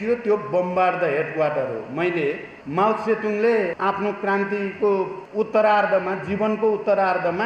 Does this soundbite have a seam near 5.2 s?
yes; 3 cuts; at 2.5 s, 3.7 s, 5.2 s

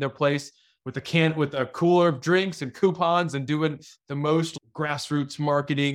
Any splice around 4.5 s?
yes; 1 cut; at 4.5 s

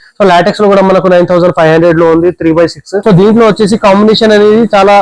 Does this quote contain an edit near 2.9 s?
yes; 1 cut; at 2.9 s

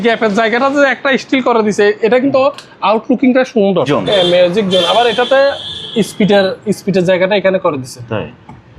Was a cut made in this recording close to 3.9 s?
yes; 1 cut; at 3.9 s

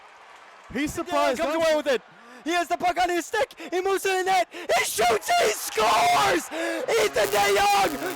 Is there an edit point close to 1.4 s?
yes; 1 cut; at 1.4 s

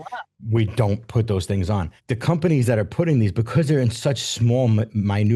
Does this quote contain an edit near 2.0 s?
yes; 1 cut; at 2.0 s

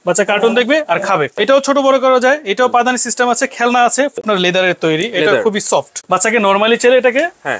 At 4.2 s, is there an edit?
yes; 3 cuts; at 1.3 s, 4.2 s, 6.0 s

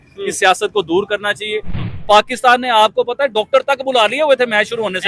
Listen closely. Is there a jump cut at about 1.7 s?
yes; 1 cut; at 1.7 s

